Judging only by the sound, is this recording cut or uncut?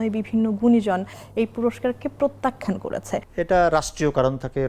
cut